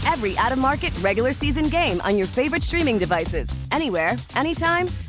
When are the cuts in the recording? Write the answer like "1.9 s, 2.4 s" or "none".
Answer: none